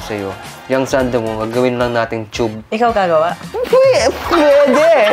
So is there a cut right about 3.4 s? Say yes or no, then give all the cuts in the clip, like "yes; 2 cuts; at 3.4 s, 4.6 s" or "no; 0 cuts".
yes; 1 cut; at 3.4 s